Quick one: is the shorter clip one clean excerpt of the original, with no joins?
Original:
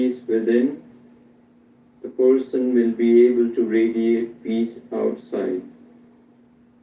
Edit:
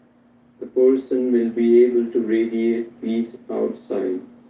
yes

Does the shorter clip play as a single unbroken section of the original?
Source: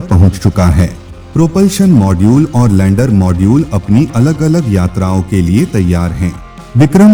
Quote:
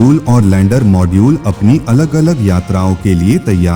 yes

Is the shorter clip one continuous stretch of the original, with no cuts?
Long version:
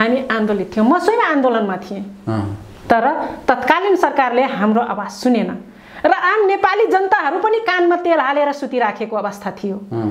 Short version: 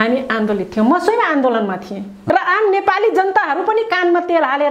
no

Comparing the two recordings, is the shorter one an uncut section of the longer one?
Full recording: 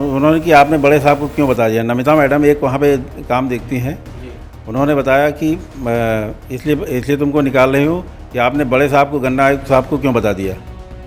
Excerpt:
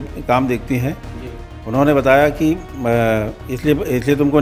yes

